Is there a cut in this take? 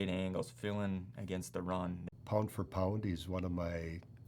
yes; 1 cut; at 2.0 s

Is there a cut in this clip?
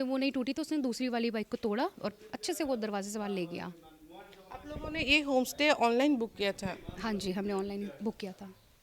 no; 0 cuts

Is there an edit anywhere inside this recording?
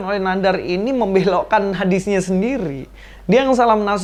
no; 0 cuts

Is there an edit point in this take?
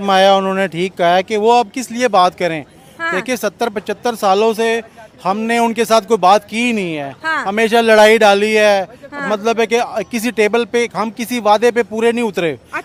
no; 0 cuts

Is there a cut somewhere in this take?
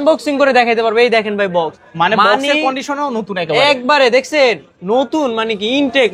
no; 0 cuts

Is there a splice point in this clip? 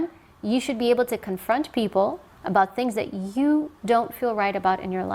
no; 0 cuts

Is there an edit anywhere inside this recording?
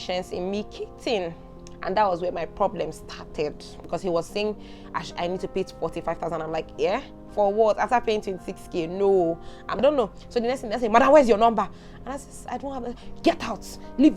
yes; 2 cuts; at 3.9 s, 9.8 s

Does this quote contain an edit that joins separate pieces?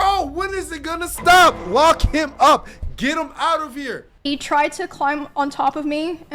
yes; 1 cut; at 4.1 s

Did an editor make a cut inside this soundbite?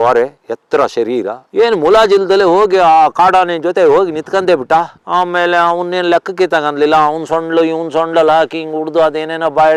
no; 0 cuts

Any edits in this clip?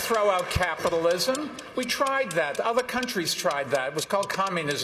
no; 0 cuts

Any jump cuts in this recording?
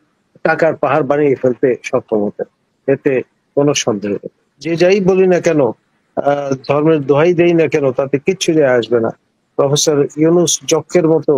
yes; 1 cut; at 4.7 s

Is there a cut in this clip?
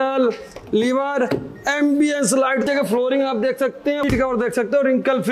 yes; 2 cuts; at 2.6 s, 4.0 s

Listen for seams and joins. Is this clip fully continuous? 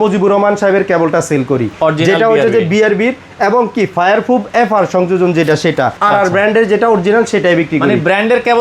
no; 1 cut; at 6.0 s

